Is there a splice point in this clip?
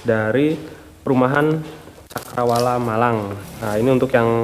yes; 1 cut; at 3.4 s

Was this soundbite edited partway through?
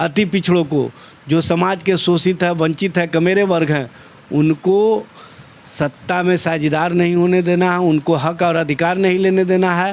no; 0 cuts

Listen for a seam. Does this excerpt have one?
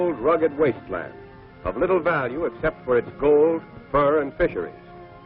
no; 0 cuts

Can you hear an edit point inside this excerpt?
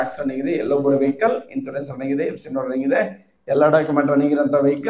no; 0 cuts

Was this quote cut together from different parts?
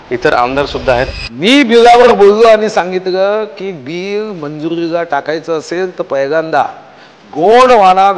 yes; 1 cut; at 1.1 s

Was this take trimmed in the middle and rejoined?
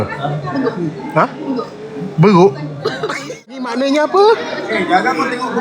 yes; 1 cut; at 3.6 s

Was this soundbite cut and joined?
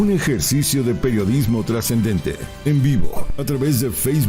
yes; 1 cut; at 2.5 s

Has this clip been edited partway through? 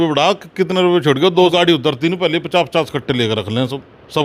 yes; 1 cut; at 1.5 s

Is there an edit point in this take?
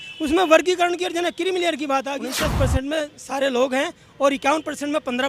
yes; 1 cut; at 2.3 s

